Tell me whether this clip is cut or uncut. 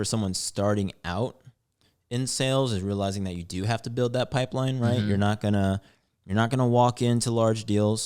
uncut